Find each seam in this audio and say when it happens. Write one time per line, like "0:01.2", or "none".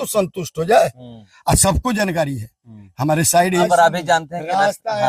0:03.6